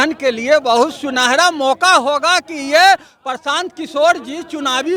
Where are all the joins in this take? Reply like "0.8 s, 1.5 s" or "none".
none

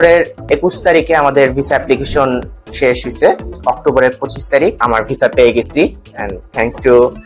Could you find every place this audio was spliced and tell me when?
3.5 s, 4.8 s

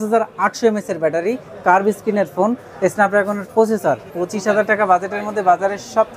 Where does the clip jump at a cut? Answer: 4.1 s

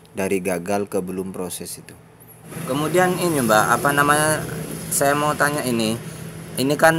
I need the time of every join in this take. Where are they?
2.5 s

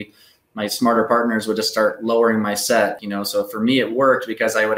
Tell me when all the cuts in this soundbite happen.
3.0 s

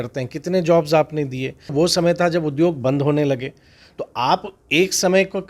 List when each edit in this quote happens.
1.7 s

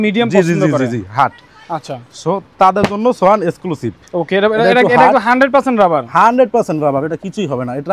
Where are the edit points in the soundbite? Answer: none

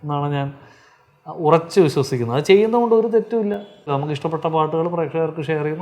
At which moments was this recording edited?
3.9 s

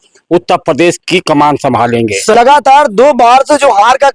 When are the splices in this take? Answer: none

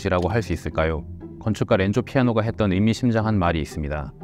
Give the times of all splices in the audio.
1.4 s

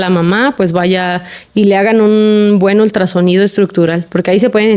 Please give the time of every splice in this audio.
none

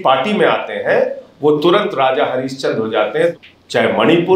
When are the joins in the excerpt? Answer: 3.3 s

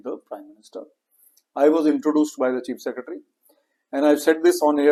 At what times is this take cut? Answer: none

